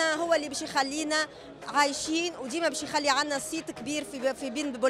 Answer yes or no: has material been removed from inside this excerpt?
no